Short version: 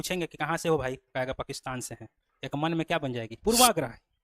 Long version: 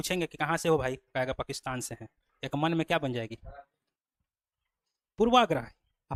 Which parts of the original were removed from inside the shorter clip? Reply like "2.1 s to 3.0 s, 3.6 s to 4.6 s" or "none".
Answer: 3.3 s to 5.1 s

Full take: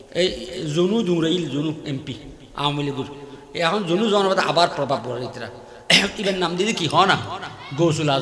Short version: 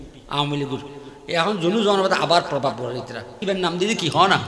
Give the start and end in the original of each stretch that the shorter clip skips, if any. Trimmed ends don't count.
5.6 s to 6.1 s

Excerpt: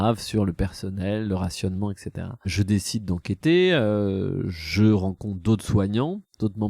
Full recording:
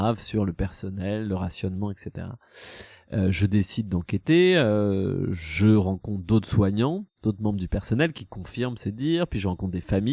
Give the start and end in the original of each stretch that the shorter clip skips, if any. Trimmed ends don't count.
2.5 s to 3.4 s

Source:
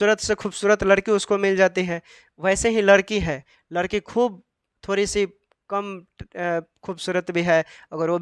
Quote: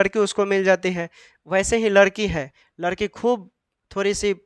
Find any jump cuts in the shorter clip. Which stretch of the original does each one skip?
none

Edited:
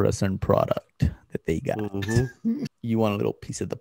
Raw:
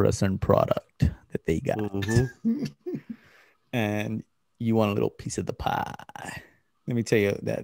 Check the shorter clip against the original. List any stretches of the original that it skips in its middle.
2.7 s to 4.5 s

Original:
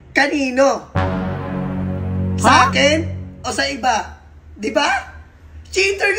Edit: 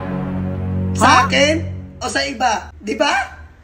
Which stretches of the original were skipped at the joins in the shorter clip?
4.2 s to 4.5 s

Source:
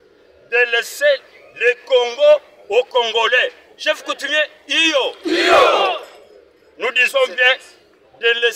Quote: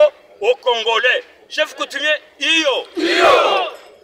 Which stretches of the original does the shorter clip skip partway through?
none

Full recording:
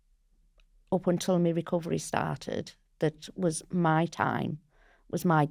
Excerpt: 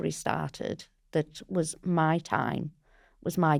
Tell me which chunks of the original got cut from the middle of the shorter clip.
none

